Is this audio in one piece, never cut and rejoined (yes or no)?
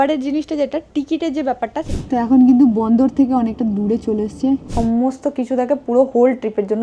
no